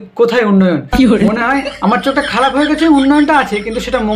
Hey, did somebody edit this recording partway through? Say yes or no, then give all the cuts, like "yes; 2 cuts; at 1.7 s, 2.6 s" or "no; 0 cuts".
no; 0 cuts